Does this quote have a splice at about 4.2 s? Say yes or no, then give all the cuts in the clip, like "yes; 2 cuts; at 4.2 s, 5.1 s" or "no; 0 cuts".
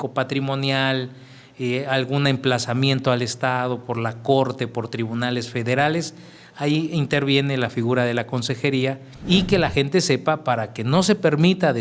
no; 1 cut; at 9.1 s